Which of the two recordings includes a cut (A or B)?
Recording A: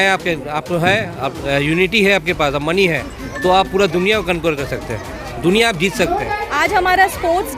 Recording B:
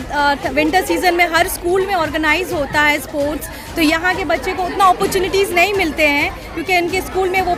A